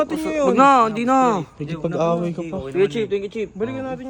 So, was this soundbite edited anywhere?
no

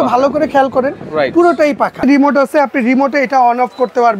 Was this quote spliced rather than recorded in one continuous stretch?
yes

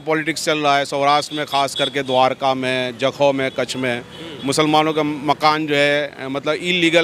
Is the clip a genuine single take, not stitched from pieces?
yes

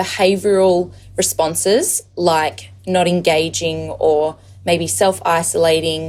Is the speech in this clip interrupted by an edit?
no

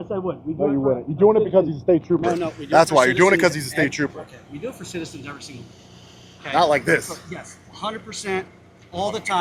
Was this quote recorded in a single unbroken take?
yes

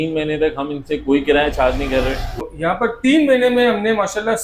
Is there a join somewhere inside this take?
yes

